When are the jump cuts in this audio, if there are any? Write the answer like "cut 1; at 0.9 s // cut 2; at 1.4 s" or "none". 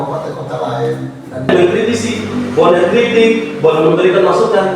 cut 1; at 1.5 s